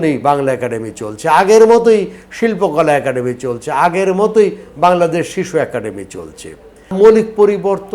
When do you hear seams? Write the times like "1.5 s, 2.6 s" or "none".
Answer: 6.9 s